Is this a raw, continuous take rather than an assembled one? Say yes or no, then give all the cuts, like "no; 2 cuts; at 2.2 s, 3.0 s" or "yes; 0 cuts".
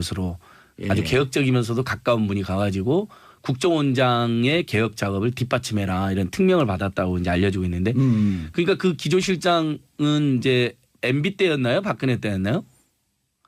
yes; 0 cuts